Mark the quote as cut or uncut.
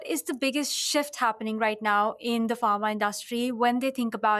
uncut